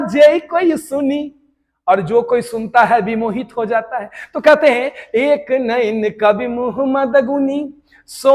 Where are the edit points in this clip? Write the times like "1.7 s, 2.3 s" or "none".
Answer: none